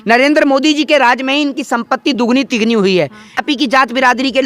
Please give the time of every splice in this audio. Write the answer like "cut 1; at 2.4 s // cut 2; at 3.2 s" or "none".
cut 1; at 3.5 s